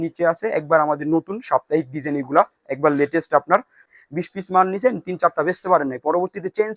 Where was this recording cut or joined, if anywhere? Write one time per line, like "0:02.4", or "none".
0:03.8